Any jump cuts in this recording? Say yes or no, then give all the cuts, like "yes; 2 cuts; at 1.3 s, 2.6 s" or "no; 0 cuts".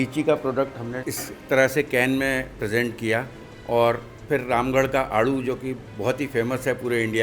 yes; 1 cut; at 0.9 s